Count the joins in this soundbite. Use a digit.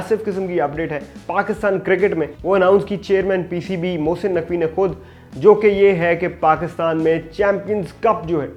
0